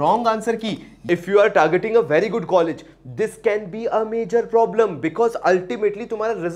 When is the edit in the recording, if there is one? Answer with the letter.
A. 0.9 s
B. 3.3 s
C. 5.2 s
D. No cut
A